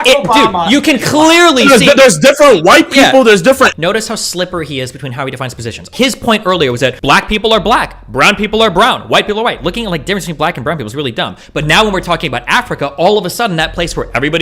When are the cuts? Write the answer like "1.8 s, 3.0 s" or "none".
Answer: 3.7 s, 5.9 s, 7.0 s